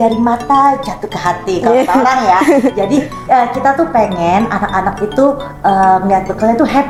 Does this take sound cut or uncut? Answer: uncut